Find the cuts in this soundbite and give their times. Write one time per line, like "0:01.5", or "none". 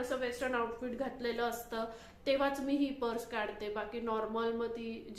none